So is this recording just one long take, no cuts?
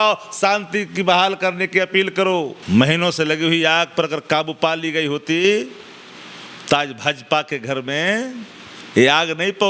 no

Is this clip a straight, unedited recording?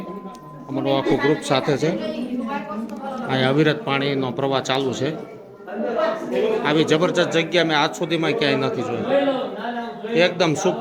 yes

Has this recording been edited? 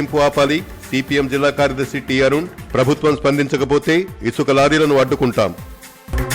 no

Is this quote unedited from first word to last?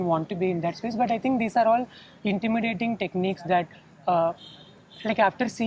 yes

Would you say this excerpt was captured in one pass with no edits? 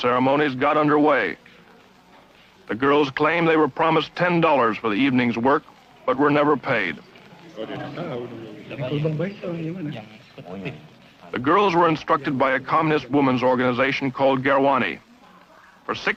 yes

